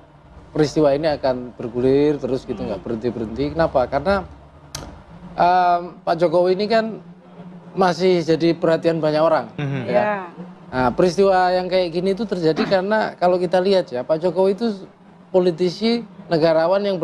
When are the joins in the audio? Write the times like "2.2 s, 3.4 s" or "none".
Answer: none